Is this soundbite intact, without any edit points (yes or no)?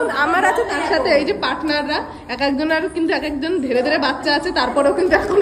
yes